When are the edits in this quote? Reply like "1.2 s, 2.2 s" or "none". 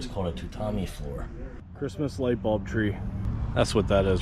1.6 s, 3.3 s